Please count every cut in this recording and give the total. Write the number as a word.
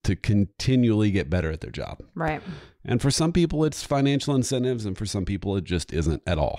zero